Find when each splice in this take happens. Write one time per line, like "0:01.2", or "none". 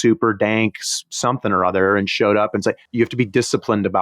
0:02.8